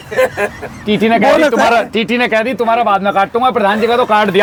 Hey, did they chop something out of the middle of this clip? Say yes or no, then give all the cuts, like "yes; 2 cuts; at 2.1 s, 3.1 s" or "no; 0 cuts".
no; 0 cuts